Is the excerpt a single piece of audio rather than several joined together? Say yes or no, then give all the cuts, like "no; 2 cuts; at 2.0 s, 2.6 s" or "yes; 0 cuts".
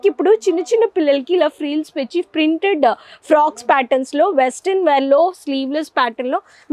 yes; 0 cuts